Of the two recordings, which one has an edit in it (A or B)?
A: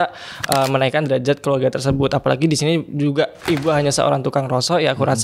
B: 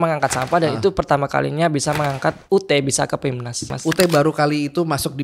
B